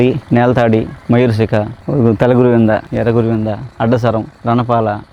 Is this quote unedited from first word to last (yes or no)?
yes